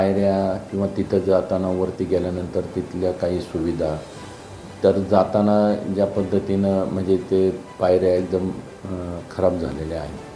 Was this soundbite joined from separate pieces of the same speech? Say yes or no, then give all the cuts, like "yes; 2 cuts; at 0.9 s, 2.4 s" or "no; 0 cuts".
no; 0 cuts